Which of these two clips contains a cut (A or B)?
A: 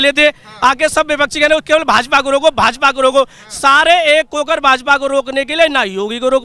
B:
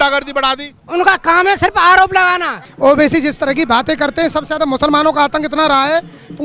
B